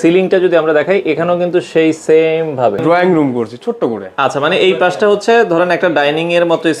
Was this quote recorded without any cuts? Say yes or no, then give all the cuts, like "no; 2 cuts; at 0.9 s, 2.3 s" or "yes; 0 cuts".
no; 1 cut; at 2.8 s